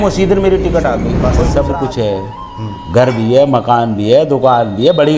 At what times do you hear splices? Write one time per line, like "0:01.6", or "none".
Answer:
0:01.3